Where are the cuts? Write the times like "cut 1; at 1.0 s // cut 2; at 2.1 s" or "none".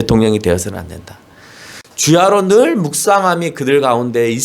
cut 1; at 1.8 s